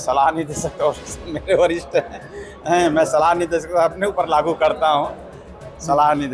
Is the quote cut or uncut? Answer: uncut